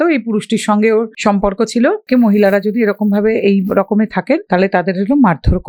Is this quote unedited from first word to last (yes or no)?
no